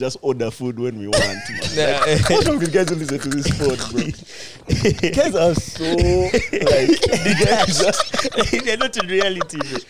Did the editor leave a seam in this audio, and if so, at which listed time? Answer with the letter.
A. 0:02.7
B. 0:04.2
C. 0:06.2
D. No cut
D